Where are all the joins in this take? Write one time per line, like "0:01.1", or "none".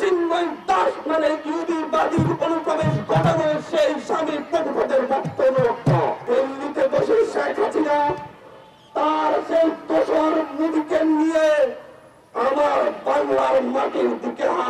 0:06.2